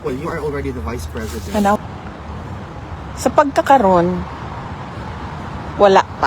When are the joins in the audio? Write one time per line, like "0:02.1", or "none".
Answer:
0:01.8